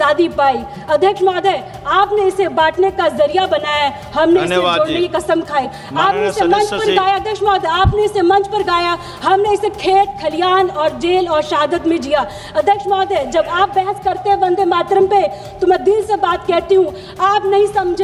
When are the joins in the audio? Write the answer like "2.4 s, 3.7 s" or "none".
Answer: none